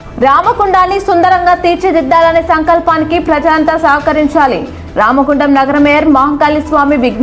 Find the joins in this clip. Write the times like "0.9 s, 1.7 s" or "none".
none